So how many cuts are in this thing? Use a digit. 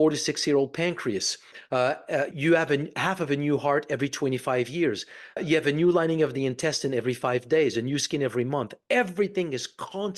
2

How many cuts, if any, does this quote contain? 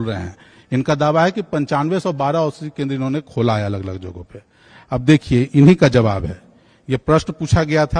0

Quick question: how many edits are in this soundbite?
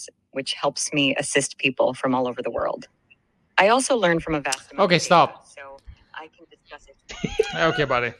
0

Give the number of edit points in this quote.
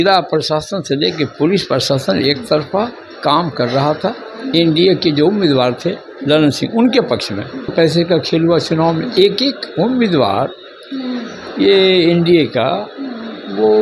1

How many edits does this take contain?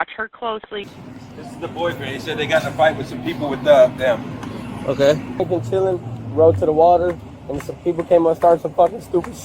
2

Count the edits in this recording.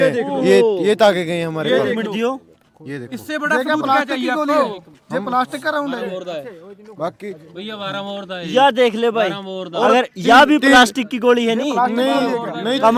0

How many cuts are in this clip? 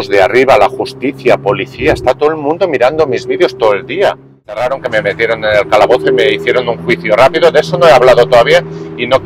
1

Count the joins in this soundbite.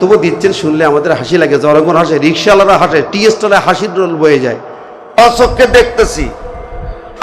1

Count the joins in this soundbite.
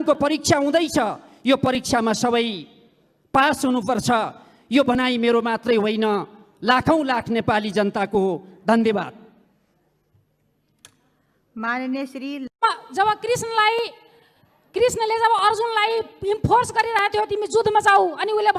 1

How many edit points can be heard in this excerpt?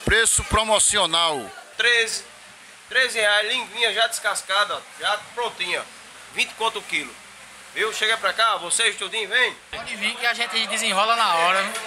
2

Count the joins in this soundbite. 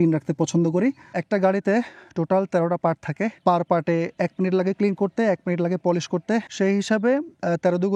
1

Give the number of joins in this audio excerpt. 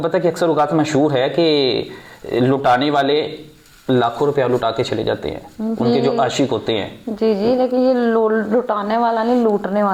0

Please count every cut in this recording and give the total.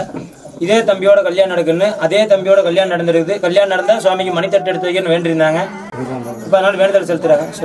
0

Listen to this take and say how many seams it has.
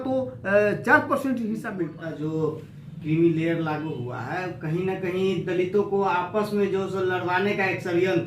1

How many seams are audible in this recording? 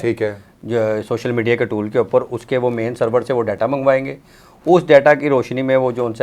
0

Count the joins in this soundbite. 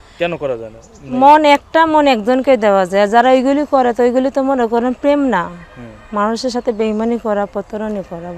0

